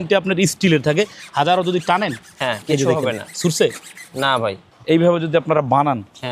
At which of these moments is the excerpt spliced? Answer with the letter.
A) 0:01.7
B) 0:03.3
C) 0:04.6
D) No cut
C